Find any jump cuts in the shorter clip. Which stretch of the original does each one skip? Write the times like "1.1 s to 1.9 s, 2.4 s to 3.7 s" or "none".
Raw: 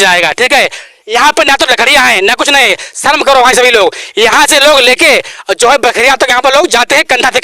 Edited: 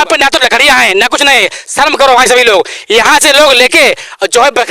none